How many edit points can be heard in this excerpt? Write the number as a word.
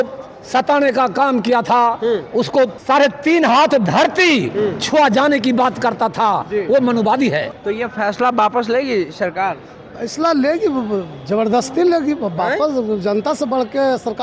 two